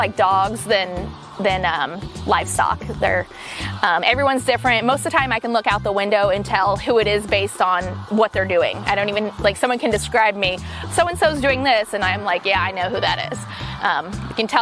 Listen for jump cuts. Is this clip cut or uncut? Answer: uncut